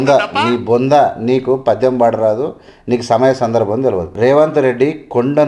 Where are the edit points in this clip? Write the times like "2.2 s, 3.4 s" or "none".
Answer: 4.1 s